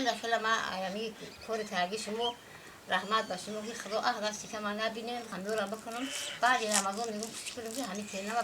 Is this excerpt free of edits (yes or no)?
no